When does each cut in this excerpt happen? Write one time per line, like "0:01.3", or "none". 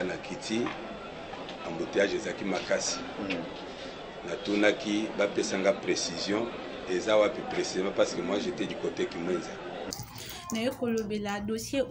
0:09.9